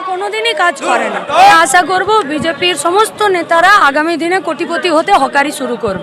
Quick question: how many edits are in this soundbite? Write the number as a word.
one